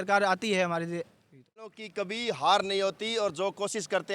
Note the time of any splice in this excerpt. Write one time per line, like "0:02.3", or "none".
0:01.8